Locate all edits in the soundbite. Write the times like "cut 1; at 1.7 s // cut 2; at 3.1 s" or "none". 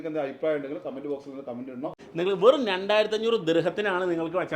cut 1; at 2.0 s